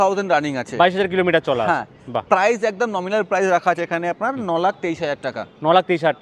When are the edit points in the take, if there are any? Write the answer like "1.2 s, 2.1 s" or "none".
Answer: none